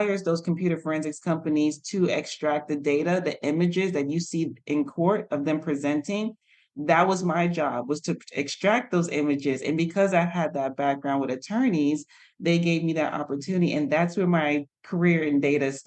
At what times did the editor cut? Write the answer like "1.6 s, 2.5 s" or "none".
none